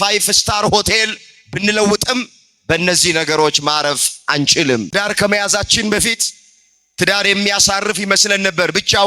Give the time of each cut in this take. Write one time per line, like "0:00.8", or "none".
0:04.9